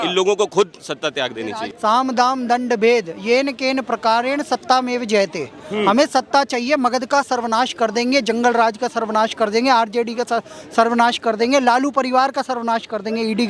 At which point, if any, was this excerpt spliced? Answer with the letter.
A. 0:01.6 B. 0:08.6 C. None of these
A